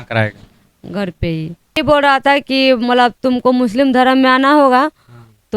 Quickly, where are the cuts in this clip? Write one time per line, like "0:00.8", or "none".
0:01.8